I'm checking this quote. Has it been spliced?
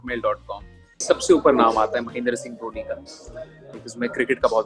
yes; 1 cut; at 1.0 s

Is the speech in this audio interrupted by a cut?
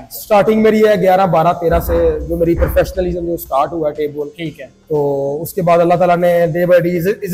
no; 0 cuts

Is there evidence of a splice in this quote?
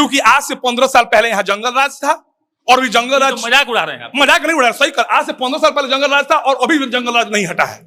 no; 0 cuts

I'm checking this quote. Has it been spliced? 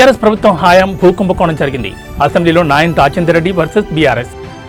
no; 0 cuts

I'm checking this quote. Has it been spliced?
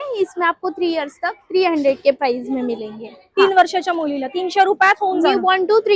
no; 0 cuts

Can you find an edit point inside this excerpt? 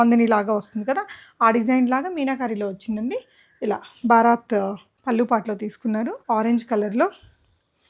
yes; 2 cuts; at 4.9 s, 6.2 s

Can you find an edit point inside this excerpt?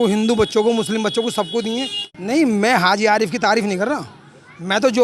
yes; 1 cut; at 2.0 s

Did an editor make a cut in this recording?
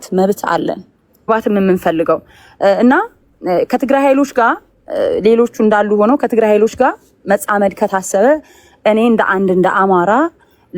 yes; 1 cut; at 1.3 s

